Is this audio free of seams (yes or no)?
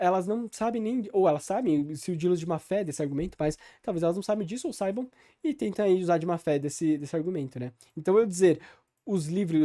yes